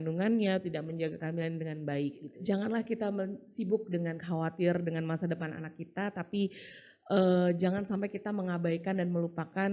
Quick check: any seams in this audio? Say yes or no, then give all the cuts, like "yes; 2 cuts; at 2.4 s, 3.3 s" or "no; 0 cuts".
yes; 1 cut; at 2.3 s